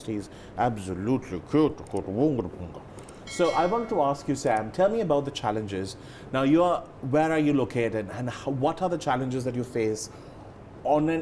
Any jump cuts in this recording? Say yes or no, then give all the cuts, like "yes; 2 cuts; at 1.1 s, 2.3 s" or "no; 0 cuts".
no; 0 cuts